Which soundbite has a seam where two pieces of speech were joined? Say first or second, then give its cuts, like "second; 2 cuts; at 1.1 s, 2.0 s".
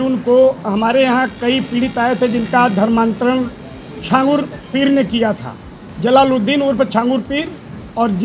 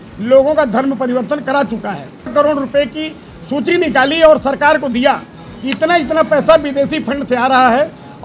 second; 1 cut; at 2.3 s